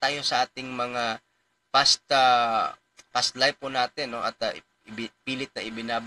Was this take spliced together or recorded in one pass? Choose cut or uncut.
uncut